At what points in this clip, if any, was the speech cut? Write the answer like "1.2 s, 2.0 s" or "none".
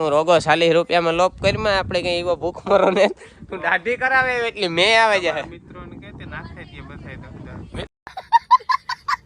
7.8 s